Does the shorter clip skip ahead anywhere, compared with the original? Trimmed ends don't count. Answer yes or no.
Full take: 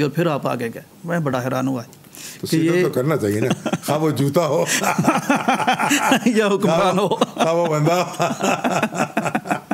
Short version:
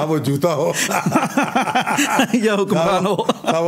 no